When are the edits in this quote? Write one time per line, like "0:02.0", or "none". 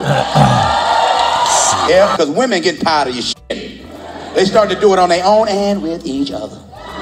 0:02.1